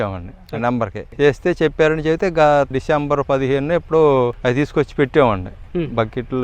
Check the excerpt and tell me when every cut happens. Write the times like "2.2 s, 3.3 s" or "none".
1.0 s, 2.7 s, 4.4 s